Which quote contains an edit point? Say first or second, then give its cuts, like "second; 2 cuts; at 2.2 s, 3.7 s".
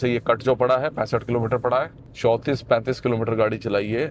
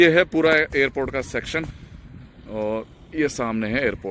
first; 1 cut; at 2.0 s